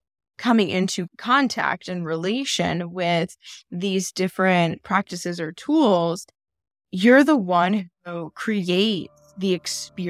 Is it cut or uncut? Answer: uncut